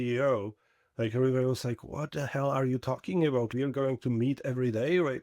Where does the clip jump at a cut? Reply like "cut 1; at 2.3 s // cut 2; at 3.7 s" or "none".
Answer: cut 1; at 3.5 s